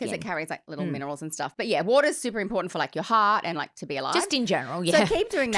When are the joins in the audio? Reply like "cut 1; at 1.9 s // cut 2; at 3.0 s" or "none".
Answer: none